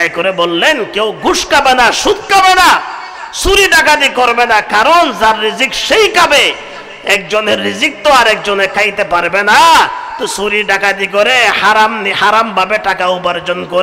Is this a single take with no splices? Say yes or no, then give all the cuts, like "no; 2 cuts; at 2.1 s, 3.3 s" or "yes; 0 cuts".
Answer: yes; 0 cuts